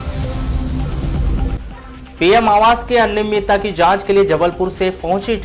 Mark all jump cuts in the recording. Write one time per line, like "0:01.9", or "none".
0:01.4